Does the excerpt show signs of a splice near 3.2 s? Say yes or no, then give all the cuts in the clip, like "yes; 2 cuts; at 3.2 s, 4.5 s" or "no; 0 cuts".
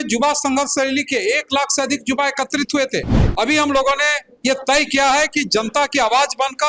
yes; 1 cut; at 3.2 s